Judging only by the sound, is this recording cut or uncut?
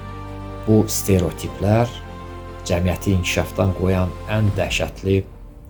uncut